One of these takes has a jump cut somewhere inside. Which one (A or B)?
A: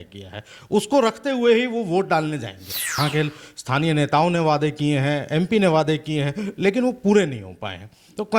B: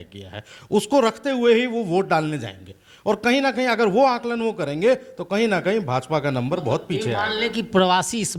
A